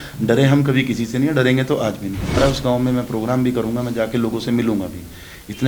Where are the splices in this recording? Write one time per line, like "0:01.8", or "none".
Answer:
0:02.4